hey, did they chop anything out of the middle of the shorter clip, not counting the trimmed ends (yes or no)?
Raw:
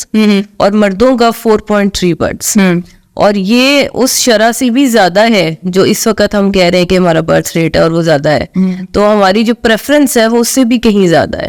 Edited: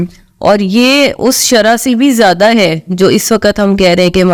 no